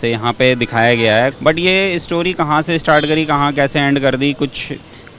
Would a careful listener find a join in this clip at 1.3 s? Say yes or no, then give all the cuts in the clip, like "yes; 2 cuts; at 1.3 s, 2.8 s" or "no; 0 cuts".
yes; 1 cut; at 1.3 s